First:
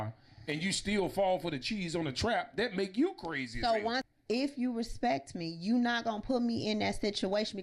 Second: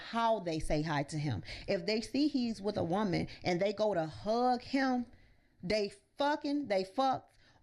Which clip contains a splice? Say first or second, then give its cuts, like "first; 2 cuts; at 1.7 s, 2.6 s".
first; 1 cut; at 4.1 s